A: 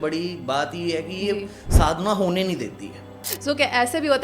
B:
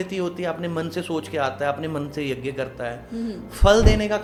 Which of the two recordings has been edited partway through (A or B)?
A